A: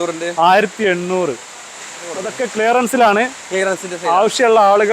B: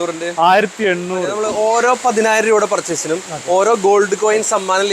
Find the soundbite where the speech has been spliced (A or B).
B